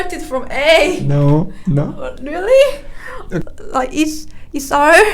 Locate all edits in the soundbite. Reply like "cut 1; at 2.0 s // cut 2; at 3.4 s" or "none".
cut 1; at 3.4 s